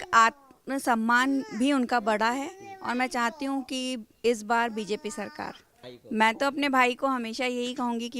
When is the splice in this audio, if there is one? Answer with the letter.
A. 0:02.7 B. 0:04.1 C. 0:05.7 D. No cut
C